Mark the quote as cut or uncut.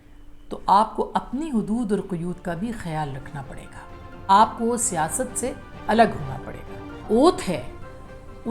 cut